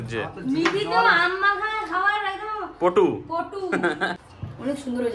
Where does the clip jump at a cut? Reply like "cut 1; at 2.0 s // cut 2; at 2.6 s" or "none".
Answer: cut 1; at 4.2 s